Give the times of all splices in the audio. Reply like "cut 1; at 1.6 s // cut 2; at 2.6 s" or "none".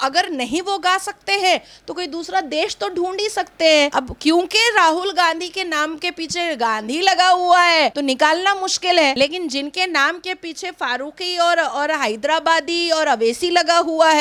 none